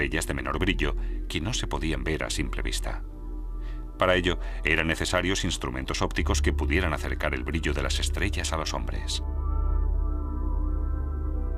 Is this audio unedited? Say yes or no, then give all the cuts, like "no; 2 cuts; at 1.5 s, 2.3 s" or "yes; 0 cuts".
yes; 0 cuts